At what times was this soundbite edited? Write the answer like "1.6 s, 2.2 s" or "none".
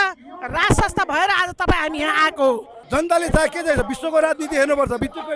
2.7 s